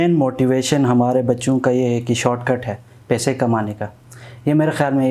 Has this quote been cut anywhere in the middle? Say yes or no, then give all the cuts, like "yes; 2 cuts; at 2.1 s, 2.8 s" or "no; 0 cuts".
no; 0 cuts